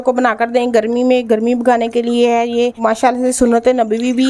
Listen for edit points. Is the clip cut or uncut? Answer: cut